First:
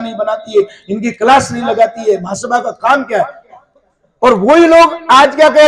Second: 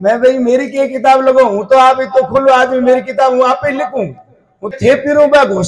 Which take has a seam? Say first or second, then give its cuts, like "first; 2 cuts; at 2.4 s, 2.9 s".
second; 1 cut; at 4.7 s